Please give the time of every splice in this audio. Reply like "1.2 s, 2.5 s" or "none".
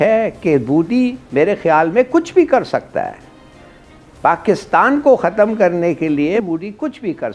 6.4 s